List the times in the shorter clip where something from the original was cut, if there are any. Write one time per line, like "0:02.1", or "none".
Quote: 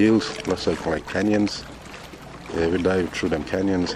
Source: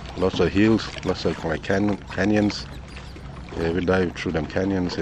0:01.0